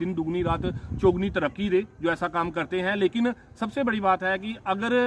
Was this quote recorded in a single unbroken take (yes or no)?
yes